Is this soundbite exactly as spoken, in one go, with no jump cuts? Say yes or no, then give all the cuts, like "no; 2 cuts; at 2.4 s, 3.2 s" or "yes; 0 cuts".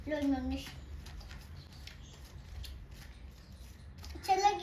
yes; 0 cuts